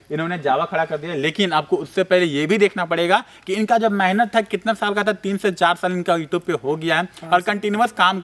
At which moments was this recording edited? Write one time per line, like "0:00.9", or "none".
none